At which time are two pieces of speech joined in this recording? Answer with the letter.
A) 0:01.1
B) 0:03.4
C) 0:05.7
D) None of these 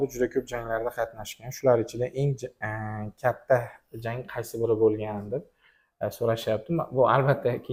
D